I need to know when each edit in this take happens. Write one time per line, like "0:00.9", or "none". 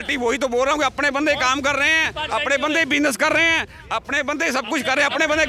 none